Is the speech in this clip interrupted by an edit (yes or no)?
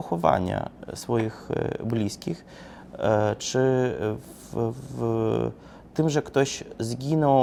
no